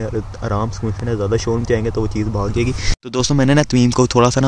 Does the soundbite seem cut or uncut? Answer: cut